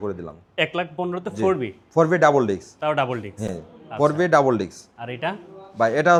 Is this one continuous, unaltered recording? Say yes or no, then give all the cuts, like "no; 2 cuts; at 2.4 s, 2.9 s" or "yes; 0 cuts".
yes; 0 cuts